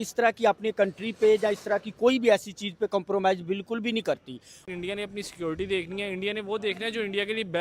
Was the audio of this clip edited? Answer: yes; 1 cut; at 4.6 s

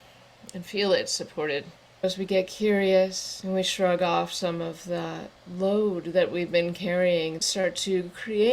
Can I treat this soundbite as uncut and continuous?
no; 3 cuts; at 1.8 s, 3.3 s, 7.5 s

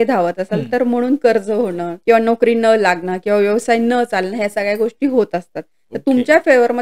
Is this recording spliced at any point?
yes; 1 cut; at 1.9 s

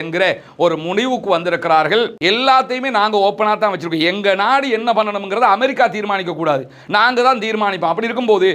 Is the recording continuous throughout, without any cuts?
no; 1 cut; at 2.1 s

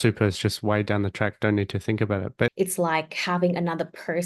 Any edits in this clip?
yes; 1 cut; at 2.5 s

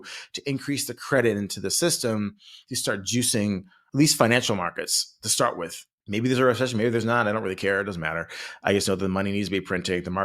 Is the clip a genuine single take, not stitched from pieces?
no; 1 cut; at 6.0 s

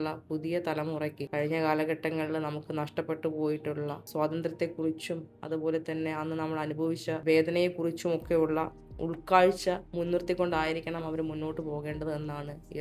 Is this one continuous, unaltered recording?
no; 4 cuts; at 1.2 s, 4.0 s, 7.2 s, 9.9 s

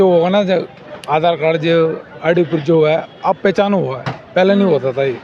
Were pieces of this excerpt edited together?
no; 0 cuts

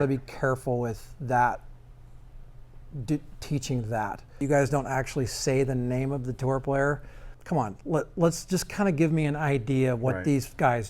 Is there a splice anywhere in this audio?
yes; 2 cuts; at 4.4 s, 7.3 s

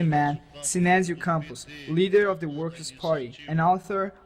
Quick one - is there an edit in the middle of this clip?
yes; 1 cut; at 3.4 s

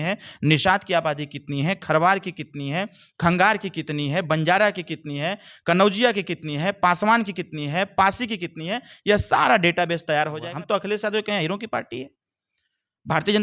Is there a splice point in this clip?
yes; 1 cut; at 10.4 s

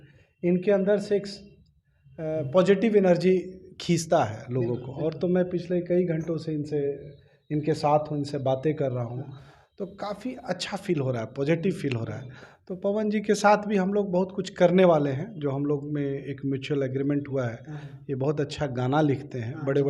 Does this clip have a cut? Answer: no; 0 cuts

